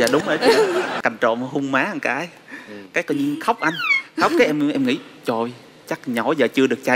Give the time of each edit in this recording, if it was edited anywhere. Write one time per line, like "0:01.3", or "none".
0:00.9